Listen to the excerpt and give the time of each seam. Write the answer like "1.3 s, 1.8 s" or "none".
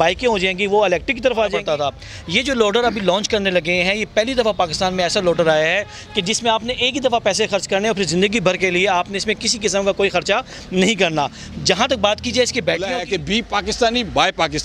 1.6 s, 13.2 s

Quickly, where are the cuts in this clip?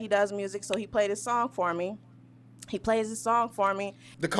none

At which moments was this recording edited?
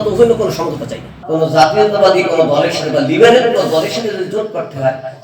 1.2 s

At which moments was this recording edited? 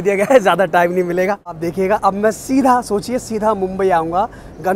1.6 s

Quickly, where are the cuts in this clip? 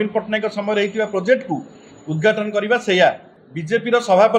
3.3 s

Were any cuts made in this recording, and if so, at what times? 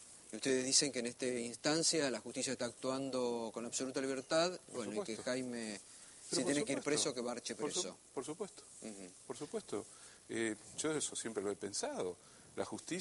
9.1 s

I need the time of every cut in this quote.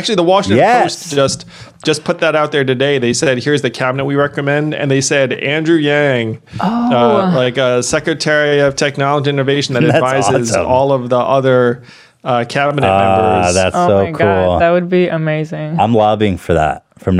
none

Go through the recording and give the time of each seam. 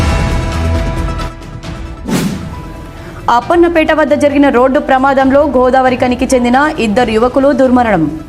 2.4 s

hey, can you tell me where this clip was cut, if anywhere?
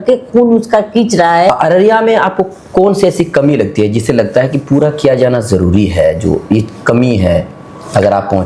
1.5 s

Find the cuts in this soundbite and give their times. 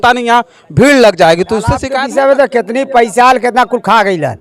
1.9 s

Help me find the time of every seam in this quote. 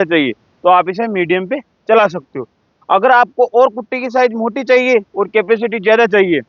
none

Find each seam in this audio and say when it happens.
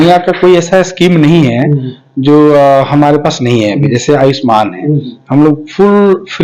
none

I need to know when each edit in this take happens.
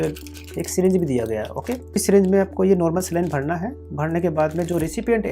2.0 s

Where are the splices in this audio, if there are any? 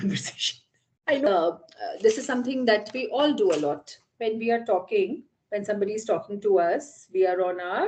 1.3 s

